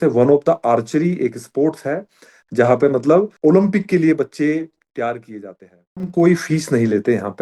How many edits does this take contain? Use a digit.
2